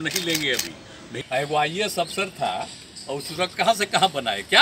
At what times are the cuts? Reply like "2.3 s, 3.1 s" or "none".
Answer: 1.2 s